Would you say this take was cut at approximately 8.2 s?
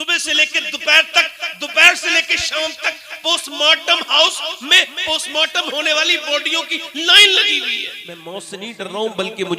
yes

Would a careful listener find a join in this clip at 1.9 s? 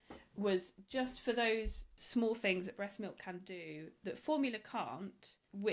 no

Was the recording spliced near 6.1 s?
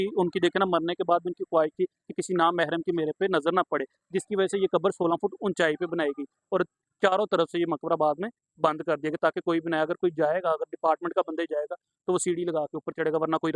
no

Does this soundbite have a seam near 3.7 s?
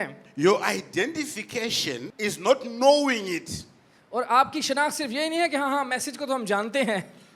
no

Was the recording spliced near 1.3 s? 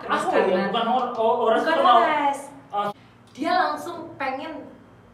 no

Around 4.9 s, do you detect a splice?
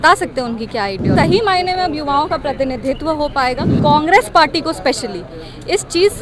no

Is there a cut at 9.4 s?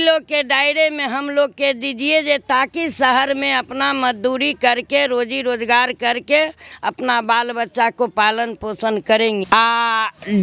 yes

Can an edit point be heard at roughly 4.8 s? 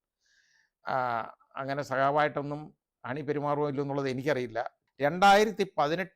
yes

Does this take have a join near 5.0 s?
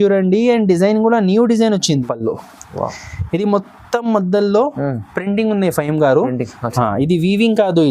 no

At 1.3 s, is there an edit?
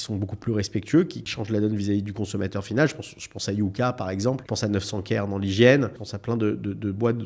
yes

